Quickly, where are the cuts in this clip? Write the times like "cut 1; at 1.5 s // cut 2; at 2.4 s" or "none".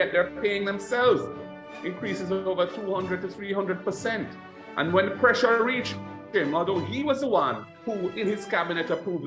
none